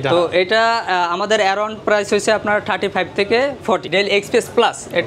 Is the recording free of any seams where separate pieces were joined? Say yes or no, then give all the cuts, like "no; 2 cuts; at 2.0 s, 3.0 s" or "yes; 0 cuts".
no; 1 cut; at 3.9 s